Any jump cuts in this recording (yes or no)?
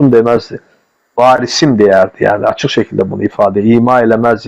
no